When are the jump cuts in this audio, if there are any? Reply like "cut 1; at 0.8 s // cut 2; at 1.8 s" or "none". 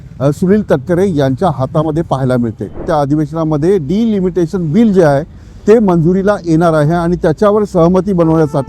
cut 1; at 2.8 s

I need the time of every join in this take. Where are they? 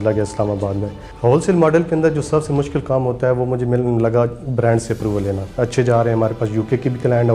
cut 1; at 1.0 s // cut 2; at 5.5 s

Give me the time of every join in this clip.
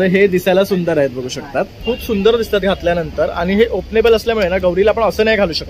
cut 1; at 1.8 s

